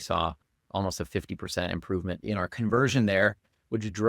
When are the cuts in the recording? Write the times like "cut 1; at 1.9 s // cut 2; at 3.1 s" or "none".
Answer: cut 1; at 2.2 s